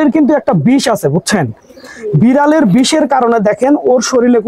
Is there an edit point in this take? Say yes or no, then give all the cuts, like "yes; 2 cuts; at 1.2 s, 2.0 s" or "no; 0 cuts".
no; 0 cuts